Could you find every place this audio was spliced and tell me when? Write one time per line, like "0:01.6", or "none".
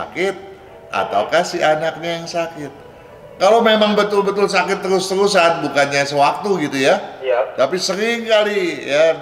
none